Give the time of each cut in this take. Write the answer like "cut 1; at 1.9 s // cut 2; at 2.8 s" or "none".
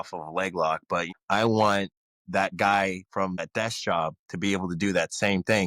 cut 1; at 1.1 s // cut 2; at 3.4 s